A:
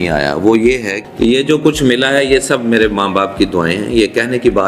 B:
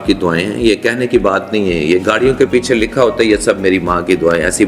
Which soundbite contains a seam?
A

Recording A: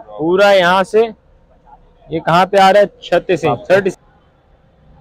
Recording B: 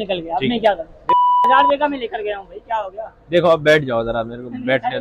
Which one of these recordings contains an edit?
A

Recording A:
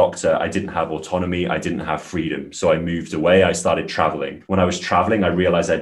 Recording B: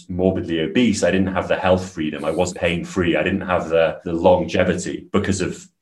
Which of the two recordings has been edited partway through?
B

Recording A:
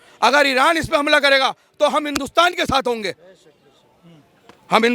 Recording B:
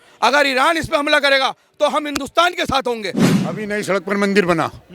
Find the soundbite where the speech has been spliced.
B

